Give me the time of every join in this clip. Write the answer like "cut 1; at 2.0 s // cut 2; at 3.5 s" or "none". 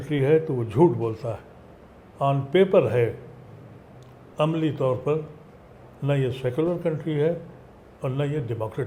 none